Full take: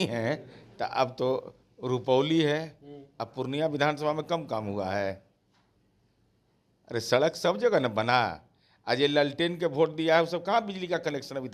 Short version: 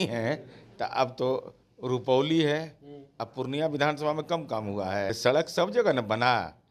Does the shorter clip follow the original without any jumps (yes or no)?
no